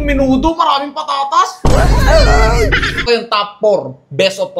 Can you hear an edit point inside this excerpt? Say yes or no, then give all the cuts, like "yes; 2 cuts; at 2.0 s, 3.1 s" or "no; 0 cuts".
yes; 1 cut; at 3.0 s